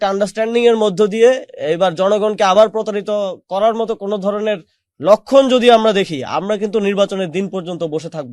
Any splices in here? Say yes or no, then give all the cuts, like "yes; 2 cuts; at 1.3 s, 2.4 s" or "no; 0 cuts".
no; 0 cuts